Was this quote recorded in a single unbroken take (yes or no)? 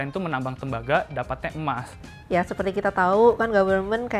no